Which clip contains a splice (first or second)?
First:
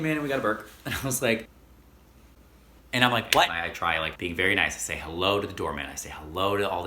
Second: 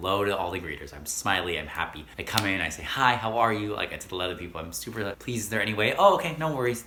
first